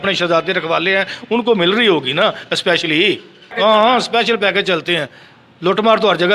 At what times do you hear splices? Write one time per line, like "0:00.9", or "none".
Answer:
0:03.4